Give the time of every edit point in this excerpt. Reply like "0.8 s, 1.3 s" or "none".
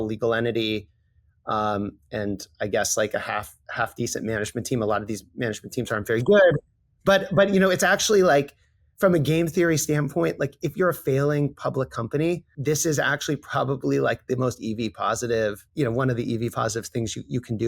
12.5 s, 15.6 s